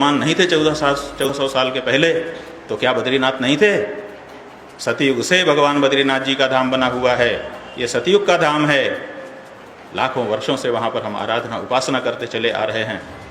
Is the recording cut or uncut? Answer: cut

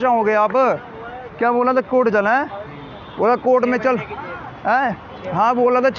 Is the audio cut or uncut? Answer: uncut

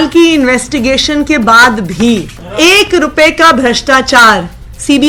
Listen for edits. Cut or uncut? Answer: cut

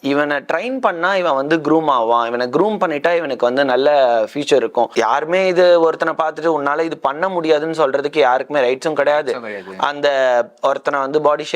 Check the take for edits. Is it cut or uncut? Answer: cut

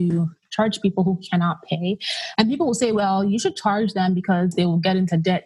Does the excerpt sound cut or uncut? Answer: cut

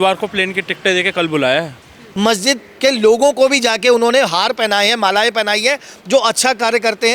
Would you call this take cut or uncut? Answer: cut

